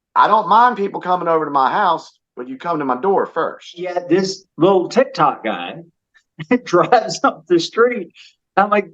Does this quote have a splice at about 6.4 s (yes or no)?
no